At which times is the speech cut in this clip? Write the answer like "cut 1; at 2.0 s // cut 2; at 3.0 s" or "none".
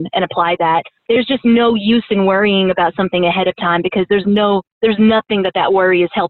cut 1; at 0.9 s